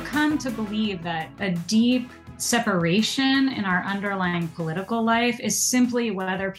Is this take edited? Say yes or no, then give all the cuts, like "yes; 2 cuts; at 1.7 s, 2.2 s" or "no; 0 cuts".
yes; 2 cuts; at 1.4 s, 2.3 s